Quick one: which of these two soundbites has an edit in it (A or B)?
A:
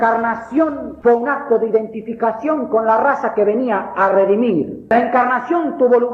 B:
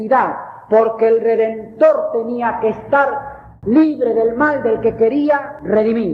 A